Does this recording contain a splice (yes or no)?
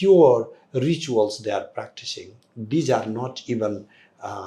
no